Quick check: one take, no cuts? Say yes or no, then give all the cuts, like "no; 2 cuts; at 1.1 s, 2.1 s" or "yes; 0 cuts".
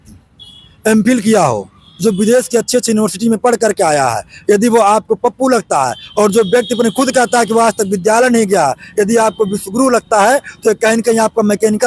yes; 0 cuts